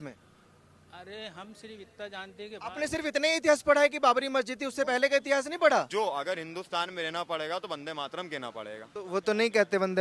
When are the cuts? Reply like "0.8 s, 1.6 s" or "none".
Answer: 5.9 s, 8.9 s